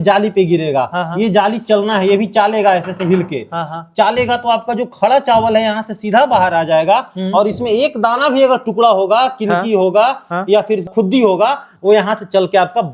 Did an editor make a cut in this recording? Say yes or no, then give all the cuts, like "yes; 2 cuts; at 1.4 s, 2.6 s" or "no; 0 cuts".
no; 0 cuts